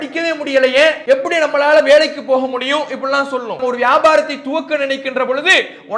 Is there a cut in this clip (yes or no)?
yes